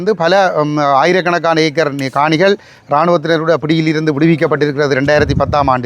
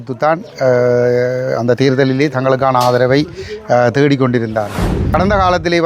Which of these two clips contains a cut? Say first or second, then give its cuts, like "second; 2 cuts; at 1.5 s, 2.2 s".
second; 1 cut; at 4.9 s